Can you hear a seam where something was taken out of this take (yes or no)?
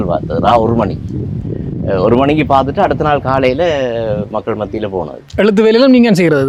no